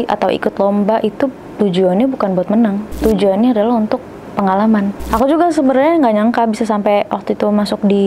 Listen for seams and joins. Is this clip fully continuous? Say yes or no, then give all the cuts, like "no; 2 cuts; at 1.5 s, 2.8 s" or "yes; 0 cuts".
no; 2 cuts; at 3.0 s, 5.0 s